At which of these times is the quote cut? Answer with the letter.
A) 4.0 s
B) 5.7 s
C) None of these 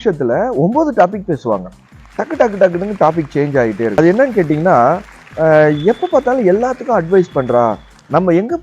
A